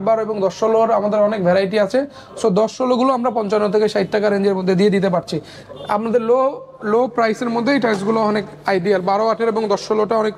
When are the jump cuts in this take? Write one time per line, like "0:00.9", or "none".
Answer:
none